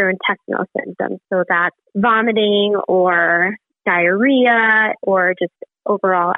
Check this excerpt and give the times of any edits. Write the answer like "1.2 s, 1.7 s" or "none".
1.8 s